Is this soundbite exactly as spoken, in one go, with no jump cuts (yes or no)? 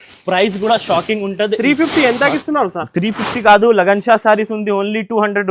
yes